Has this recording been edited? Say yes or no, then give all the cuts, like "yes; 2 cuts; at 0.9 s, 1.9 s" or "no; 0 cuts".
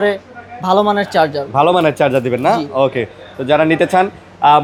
no; 0 cuts